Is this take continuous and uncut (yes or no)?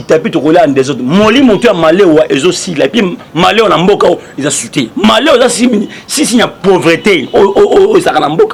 yes